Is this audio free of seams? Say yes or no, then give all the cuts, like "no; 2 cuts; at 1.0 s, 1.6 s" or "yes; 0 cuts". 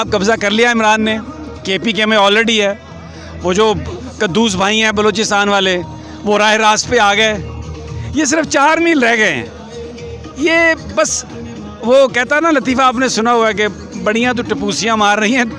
yes; 0 cuts